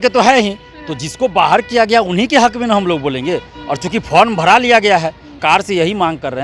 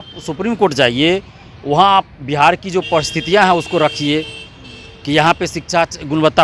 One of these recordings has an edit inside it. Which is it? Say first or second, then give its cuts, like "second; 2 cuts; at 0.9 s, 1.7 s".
first; 1 cut; at 5.3 s